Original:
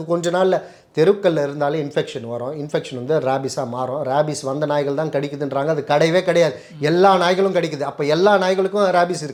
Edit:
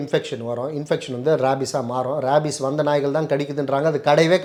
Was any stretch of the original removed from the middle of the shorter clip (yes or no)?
no